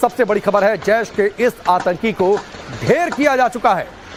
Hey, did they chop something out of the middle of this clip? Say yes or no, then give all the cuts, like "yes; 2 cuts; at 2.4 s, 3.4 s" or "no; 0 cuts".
no; 0 cuts